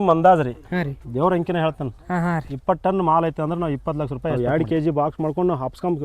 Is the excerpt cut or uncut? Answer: cut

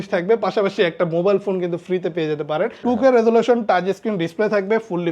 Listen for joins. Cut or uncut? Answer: cut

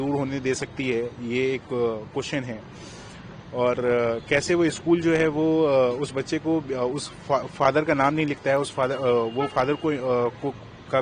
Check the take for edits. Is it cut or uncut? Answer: uncut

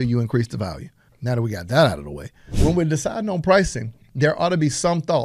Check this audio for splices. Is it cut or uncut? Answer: cut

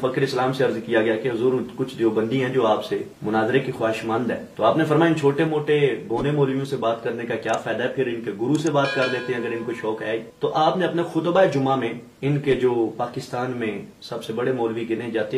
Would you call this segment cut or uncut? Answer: uncut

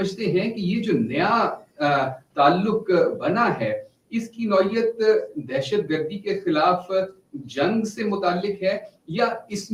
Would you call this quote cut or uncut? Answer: uncut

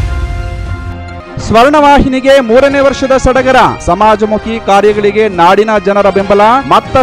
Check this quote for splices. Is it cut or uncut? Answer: cut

